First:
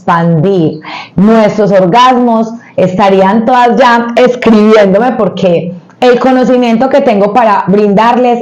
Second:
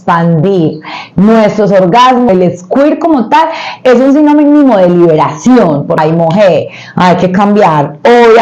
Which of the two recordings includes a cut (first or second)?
second